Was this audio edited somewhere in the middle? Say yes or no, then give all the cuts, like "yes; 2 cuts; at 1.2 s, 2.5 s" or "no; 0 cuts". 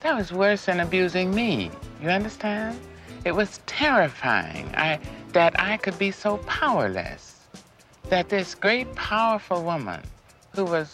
yes; 1 cut; at 1.8 s